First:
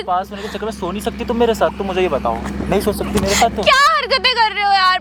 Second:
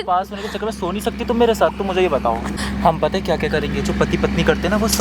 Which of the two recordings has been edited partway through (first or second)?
second